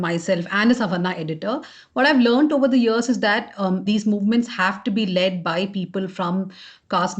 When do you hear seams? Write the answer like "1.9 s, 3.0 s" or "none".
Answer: 3.8 s